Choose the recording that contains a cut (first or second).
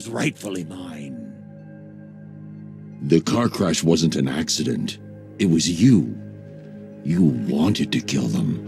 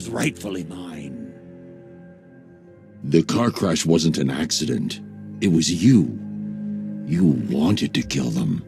second